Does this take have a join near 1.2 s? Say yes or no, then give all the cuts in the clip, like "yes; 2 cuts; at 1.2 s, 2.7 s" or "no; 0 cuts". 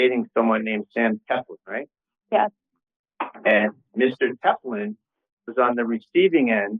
no; 0 cuts